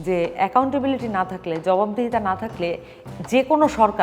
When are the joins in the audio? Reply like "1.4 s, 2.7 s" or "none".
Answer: none